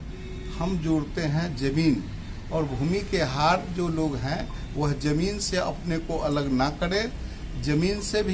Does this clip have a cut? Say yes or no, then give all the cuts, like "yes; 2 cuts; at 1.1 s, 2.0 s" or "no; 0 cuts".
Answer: no; 0 cuts